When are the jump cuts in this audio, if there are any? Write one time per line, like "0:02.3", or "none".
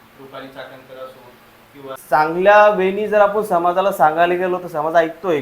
0:02.0

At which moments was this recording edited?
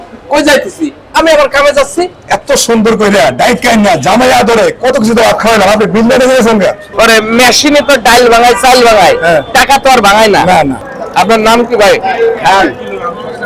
0:06.9
0:10.8

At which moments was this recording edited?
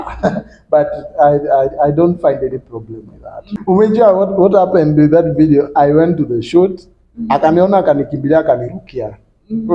0:03.5

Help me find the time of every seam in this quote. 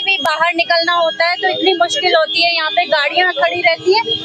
none

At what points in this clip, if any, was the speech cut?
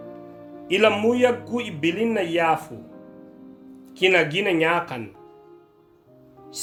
none

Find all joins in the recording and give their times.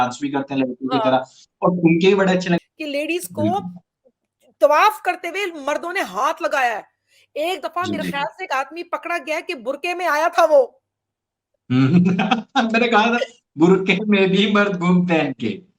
0:02.6

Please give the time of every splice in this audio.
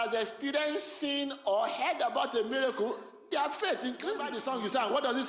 0:04.3

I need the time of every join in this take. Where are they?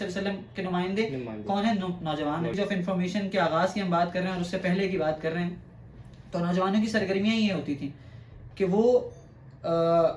0:02.6

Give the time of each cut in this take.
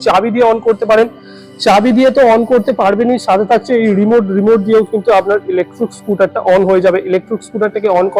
none

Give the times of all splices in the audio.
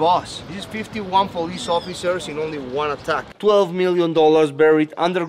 0:03.3

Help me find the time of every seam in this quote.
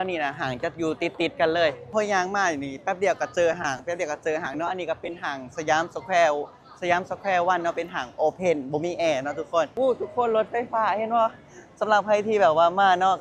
0:01.9
0:09.7

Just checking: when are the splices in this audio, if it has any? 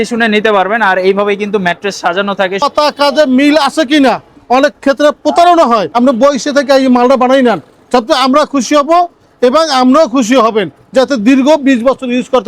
0:02.6
0:05.9

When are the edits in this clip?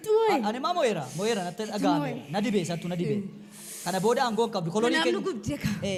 none

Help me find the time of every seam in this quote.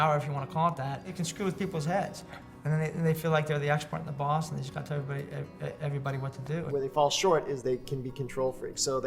0:01.2
0:06.6

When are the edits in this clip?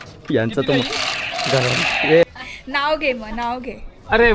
0:02.2

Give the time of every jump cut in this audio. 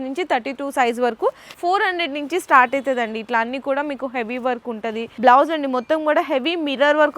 0:01.5
0:05.1

